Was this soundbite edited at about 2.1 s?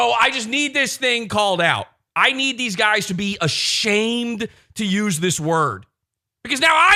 no; 0 cuts

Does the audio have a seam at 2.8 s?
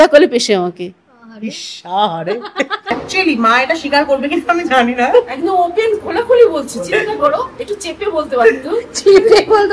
yes; 1 cut; at 2.8 s

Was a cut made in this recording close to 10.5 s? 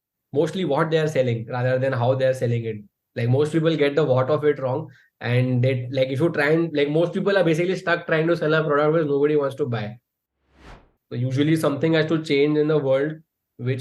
yes; 1 cut; at 10.5 s

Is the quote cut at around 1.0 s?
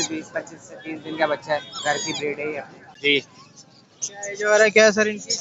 no; 1 cut; at 2.8 s

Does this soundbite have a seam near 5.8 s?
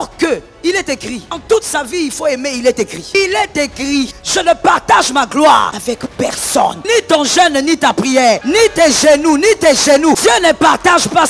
yes; 7 cuts; at 1.4 s, 3.1 s, 4.2 s, 5.8 s, 6.8 s, 8.4 s, 10.2 s

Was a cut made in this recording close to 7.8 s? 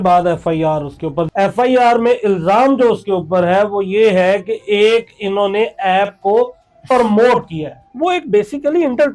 yes; 2 cuts; at 1.3 s, 7.8 s

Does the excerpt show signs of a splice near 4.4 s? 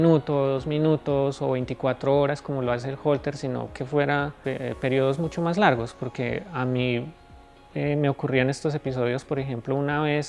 yes; 1 cut; at 4.4 s

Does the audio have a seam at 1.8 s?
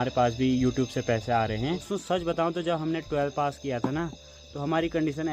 yes; 1 cut; at 1.8 s

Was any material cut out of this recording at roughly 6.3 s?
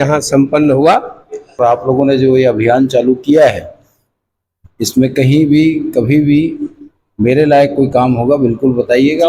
no; 1 cut; at 1.6 s

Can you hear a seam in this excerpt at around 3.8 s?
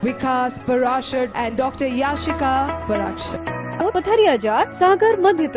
yes; 1 cut; at 3.8 s

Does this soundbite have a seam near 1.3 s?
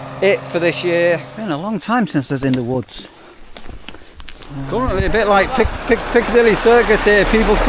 yes; 2 cuts; at 1.3 s, 4.7 s

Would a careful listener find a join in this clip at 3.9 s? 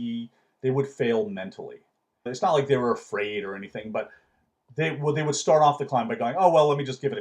no; 1 cut; at 2.3 s

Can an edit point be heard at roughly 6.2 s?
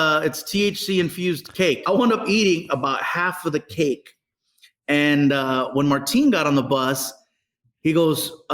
no; 1 cut; at 1.8 s

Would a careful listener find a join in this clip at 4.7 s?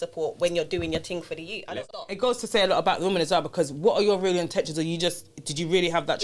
no; 1 cut; at 1.7 s

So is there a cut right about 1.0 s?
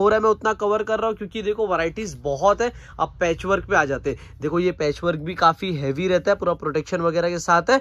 no; 0 cuts

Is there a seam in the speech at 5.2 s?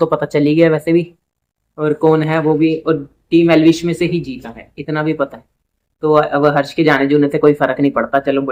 no; 0 cuts

